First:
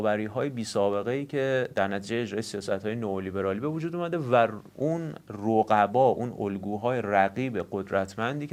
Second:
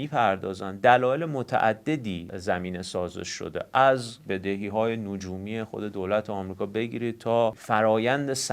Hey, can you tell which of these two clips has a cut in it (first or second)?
second